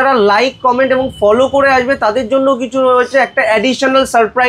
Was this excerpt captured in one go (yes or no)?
yes